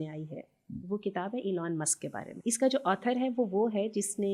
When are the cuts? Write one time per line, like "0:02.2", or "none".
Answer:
0:02.3